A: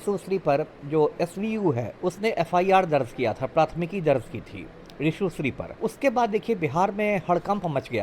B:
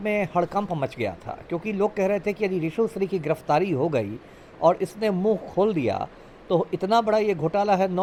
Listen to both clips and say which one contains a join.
A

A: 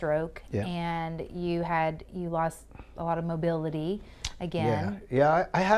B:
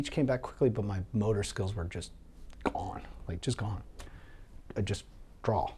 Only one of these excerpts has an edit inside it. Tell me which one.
B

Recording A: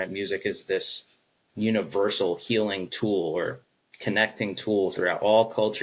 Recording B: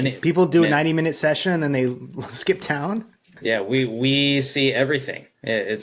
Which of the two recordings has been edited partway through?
B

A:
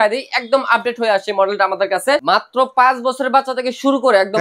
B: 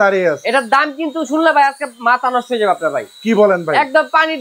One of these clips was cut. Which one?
A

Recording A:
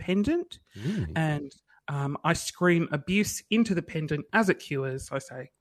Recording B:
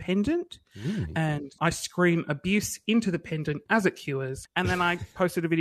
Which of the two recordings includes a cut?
B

